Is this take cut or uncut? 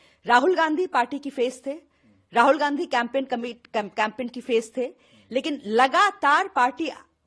uncut